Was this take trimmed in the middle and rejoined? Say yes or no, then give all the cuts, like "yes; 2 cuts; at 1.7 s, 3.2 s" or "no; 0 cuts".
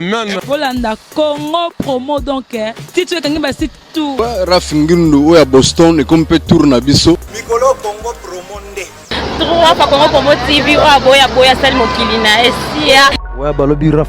yes; 3 cuts; at 4.1 s, 7.3 s, 13.2 s